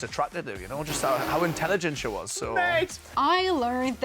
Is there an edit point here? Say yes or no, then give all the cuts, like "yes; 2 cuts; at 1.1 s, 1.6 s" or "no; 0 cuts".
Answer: yes; 1 cut; at 3.1 s